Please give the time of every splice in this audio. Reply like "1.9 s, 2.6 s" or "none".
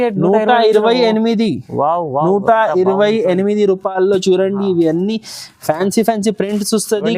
none